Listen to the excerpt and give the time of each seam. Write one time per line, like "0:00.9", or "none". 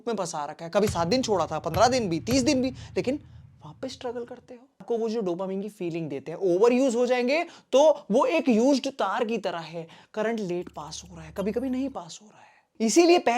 0:04.8

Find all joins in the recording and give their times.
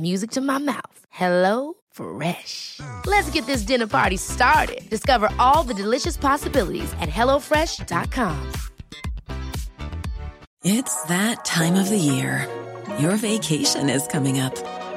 0:10.4

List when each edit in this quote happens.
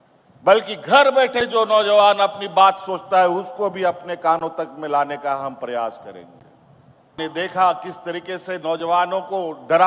0:07.1

